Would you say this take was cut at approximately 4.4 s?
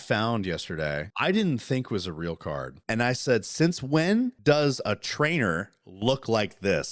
yes; 3 cuts; at 1.1 s, 2.7 s, 4.4 s

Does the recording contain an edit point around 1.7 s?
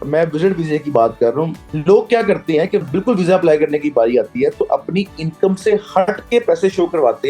yes; 2 cuts; at 1.7 s, 2.9 s

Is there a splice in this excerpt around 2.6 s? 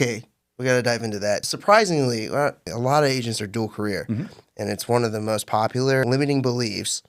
yes; 3 cuts; at 1.5 s, 2.6 s, 6.0 s

